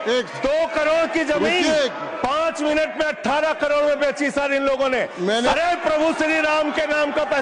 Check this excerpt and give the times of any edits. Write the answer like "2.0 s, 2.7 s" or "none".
5.5 s